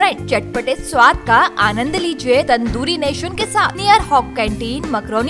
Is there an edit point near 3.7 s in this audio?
yes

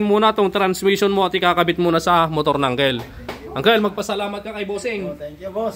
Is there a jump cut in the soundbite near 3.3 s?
no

